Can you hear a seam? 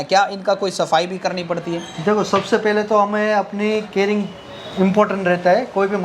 no; 0 cuts

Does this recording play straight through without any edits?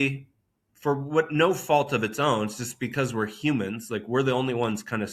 yes; 0 cuts

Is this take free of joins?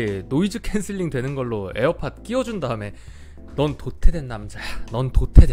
yes; 0 cuts

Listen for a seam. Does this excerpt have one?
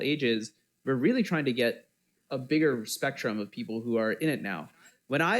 no; 0 cuts

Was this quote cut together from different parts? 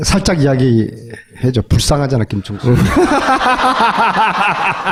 no; 0 cuts

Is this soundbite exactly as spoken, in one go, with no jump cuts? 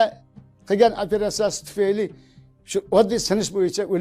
yes; 0 cuts

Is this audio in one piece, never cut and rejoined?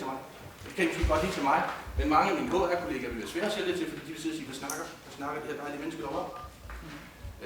yes; 0 cuts

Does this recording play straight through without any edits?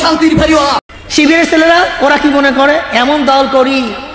no; 1 cut; at 0.9 s

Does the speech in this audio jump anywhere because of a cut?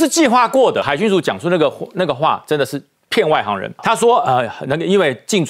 yes; 2 cuts; at 0.9 s, 3.8 s

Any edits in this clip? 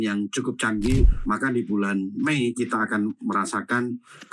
yes; 1 cut; at 1.1 s

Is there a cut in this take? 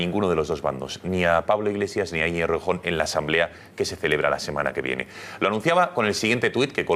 yes; 1 cut; at 4.8 s

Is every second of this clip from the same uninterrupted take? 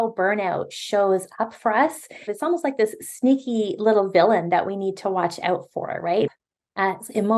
no; 2 cuts; at 2.3 s, 6.3 s

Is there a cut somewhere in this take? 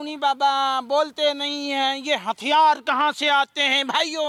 no; 0 cuts

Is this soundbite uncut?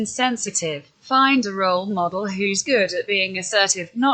no; 1 cut; at 0.9 s

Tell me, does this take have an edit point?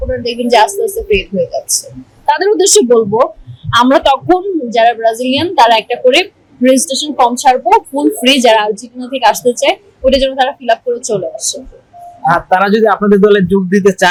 no; 0 cuts

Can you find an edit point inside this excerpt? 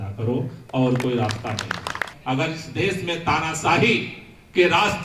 yes; 1 cut; at 2.1 s

